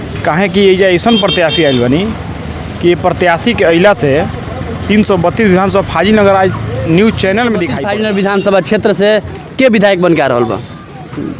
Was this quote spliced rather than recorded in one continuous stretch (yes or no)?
yes